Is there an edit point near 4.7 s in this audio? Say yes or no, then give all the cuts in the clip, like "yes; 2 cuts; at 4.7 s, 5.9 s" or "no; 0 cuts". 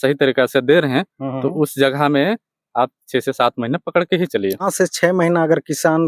yes; 1 cut; at 4.7 s